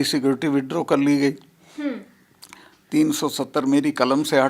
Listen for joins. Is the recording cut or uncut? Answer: uncut